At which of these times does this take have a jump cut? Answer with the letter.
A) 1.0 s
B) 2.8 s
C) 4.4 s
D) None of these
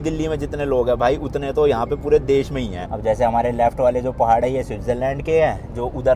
B